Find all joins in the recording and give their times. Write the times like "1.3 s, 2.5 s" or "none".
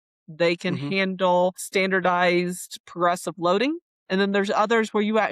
1.6 s